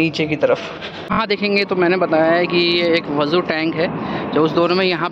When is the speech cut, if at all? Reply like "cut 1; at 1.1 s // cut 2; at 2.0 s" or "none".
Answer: cut 1; at 1.1 s